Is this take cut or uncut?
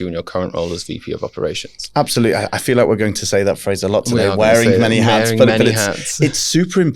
uncut